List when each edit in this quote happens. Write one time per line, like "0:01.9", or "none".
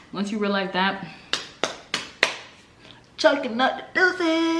none

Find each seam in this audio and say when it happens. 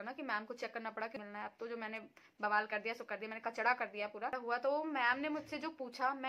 0:01.1
0:04.3

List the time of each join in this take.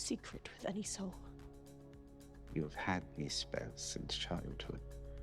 0:01.3

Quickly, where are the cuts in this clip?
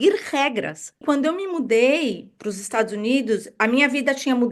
0:01.0
0:02.3

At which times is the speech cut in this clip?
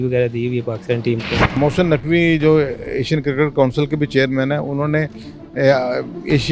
0:01.6

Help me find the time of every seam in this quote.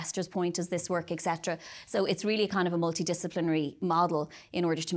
0:03.8

